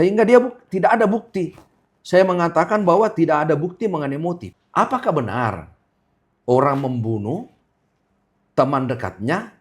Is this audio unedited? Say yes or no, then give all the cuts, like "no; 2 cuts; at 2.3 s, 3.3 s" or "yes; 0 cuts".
no; 1 cut; at 4.5 s